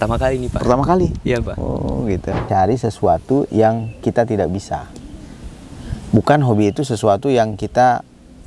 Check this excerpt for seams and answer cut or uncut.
cut